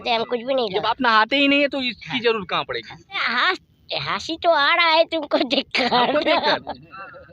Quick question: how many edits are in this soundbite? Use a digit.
1